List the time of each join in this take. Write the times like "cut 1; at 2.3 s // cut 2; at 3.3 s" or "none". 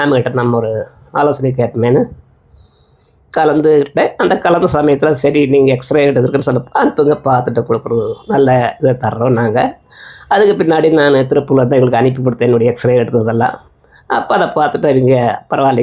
none